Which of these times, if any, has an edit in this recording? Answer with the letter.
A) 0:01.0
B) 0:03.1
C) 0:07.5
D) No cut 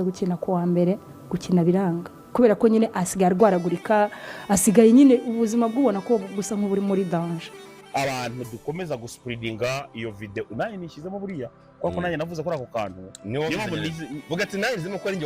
C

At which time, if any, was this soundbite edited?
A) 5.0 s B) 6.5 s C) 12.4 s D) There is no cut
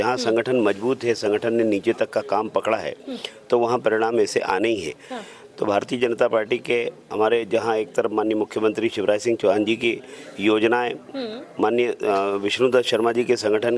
D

